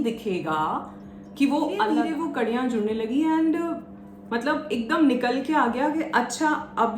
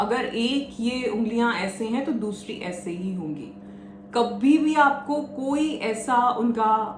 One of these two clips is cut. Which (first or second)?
first